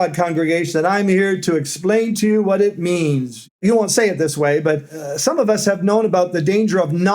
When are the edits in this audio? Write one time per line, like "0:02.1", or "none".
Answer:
0:03.6
0:05.0